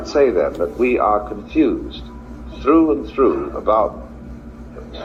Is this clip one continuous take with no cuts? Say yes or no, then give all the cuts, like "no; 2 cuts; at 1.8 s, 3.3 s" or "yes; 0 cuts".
yes; 0 cuts